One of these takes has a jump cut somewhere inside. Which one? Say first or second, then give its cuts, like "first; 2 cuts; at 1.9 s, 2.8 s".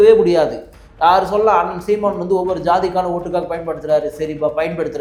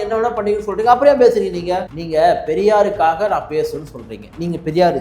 second; 1 cut; at 1.9 s